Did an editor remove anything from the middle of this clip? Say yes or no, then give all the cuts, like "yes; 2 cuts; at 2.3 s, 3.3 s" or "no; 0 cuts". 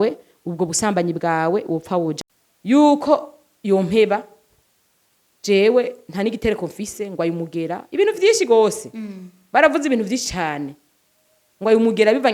yes; 1 cut; at 2.2 s